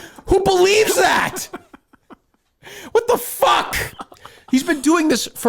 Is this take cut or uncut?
uncut